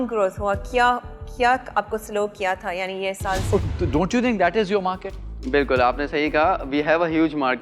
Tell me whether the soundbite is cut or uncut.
cut